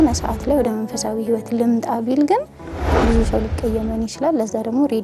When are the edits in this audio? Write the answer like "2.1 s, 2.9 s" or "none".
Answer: 2.8 s